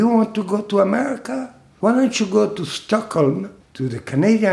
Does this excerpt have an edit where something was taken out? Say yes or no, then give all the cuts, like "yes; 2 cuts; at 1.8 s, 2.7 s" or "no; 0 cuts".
yes; 1 cut; at 1.7 s